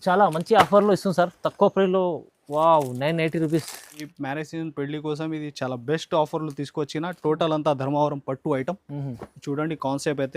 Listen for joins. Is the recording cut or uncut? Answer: cut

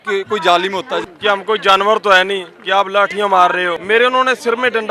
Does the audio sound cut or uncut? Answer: cut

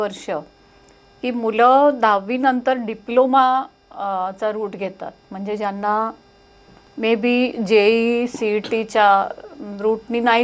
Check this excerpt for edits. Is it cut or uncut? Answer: uncut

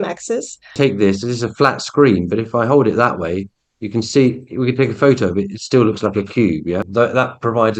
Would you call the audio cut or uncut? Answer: cut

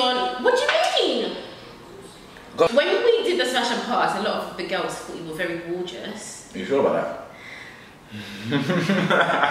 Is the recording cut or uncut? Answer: cut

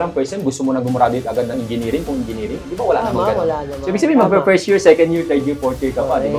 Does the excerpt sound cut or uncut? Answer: uncut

